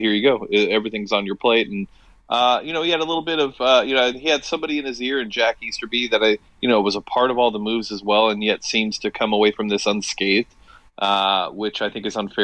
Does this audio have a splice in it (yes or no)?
no